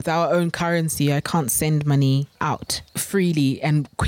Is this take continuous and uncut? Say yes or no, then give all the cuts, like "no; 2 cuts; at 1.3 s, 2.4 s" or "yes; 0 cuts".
no; 1 cut; at 2.4 s